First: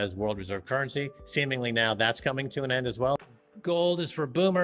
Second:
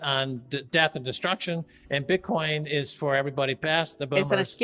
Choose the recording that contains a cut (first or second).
first